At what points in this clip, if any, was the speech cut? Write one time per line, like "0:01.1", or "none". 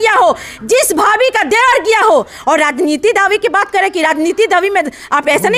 none